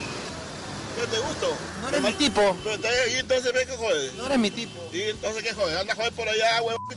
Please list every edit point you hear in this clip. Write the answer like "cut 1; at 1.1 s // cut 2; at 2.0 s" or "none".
none